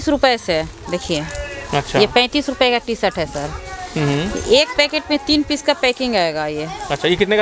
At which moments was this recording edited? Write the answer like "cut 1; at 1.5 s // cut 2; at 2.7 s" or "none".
none